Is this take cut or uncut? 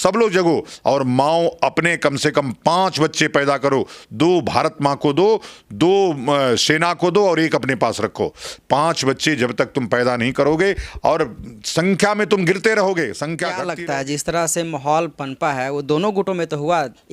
cut